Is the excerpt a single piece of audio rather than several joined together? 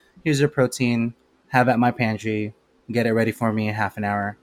yes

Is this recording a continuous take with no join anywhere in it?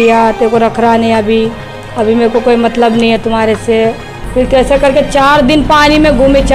no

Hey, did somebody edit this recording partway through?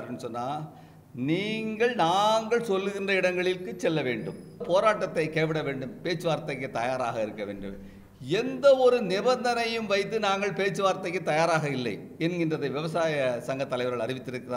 yes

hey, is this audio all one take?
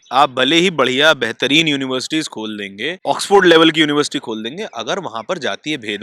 no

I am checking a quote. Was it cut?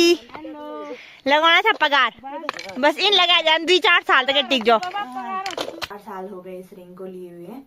yes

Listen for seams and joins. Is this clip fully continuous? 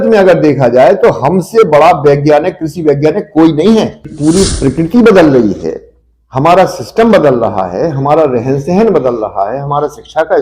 no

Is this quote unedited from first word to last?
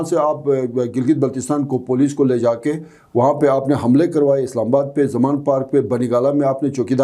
yes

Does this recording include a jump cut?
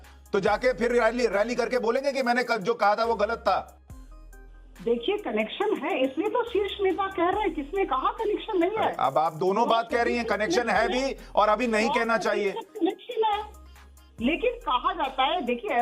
no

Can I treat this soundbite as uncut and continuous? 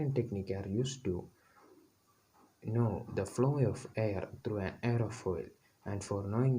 yes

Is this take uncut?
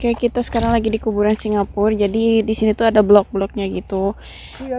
yes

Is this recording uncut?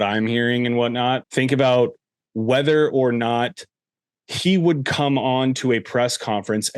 no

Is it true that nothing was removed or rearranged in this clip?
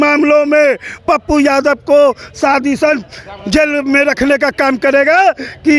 yes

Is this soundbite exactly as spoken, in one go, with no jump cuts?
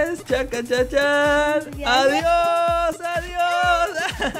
yes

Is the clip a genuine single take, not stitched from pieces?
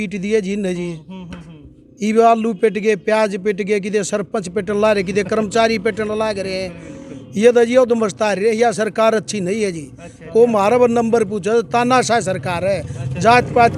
yes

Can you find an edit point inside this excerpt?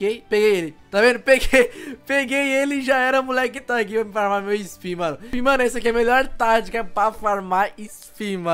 yes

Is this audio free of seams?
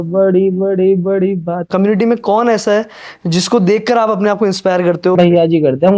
no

